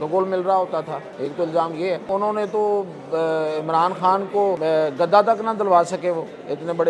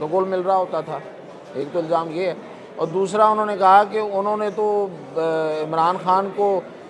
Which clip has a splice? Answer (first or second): first